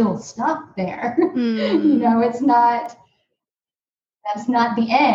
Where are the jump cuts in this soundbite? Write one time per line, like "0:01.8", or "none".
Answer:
none